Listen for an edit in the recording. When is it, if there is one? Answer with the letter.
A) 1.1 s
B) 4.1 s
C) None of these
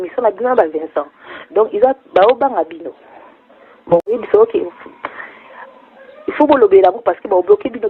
B